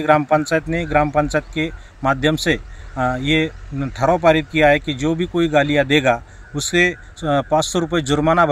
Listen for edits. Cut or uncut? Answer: uncut